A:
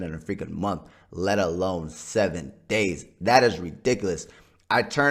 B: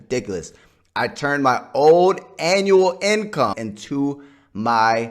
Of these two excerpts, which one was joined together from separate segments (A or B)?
B